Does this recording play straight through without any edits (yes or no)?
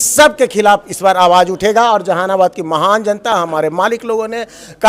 yes